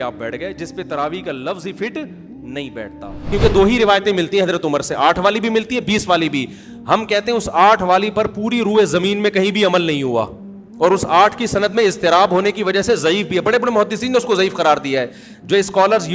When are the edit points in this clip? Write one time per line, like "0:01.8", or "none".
0:03.3